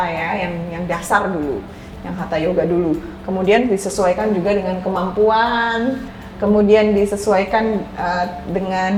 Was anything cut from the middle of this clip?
no; 0 cuts

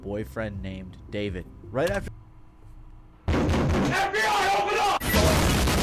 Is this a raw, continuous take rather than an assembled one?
yes; 0 cuts

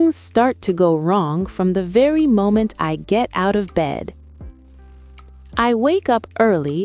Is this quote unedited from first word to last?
no; 2 cuts; at 4.2 s, 5.6 s

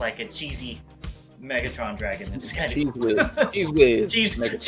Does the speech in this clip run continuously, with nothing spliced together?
yes; 0 cuts

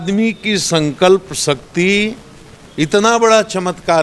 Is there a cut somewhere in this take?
no; 0 cuts

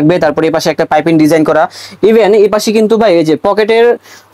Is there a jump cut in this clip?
no; 0 cuts

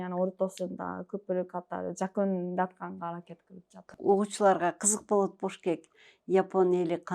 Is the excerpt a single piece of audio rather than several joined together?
no; 1 cut; at 3.9 s

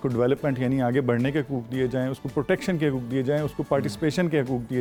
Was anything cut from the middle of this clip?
no; 0 cuts

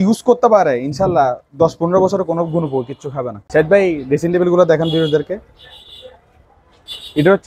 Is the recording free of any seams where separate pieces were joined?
no; 1 cut; at 3.3 s

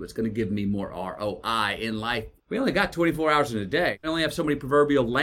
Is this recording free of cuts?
no; 2 cuts; at 2.3 s, 4.0 s

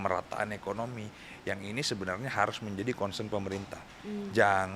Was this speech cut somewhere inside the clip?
no; 0 cuts

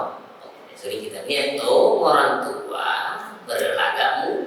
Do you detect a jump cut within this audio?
yes; 1 cut; at 1.1 s

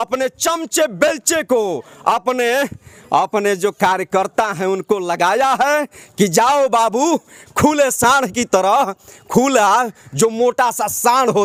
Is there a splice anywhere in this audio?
no; 0 cuts

